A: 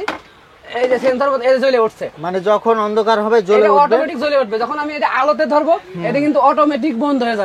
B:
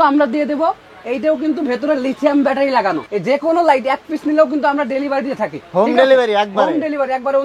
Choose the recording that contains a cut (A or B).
B